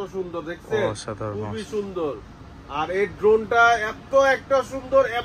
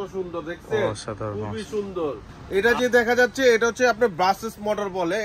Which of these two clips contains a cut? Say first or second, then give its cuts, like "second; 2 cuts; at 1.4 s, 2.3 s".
second; 1 cut; at 2.4 s